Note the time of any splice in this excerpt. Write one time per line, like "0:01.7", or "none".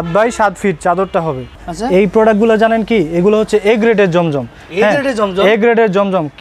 0:01.6

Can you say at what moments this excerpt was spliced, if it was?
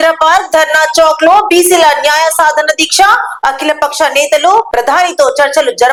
none

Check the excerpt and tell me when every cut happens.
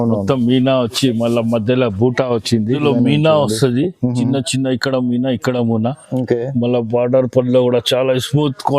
0:02.8

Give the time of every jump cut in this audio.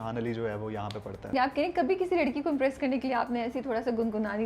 0:01.3

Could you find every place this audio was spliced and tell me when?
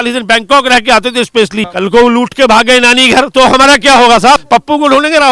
0:01.7
0:04.4

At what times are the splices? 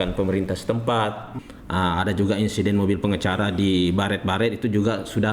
0:01.3

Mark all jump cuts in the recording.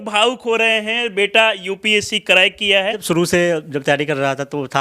0:03.0

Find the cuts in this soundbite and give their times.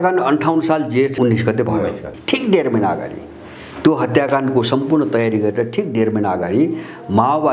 0:01.1

